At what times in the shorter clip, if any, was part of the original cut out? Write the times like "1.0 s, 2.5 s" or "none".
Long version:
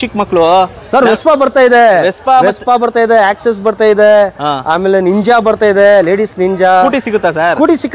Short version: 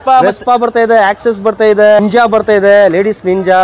2.0 s